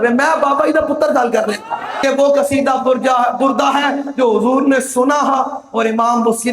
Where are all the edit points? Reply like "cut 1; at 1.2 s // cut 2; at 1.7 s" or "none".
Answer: cut 1; at 2.0 s